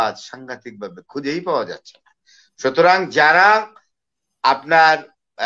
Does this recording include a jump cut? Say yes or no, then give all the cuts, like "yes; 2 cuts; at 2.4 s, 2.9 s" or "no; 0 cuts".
no; 0 cuts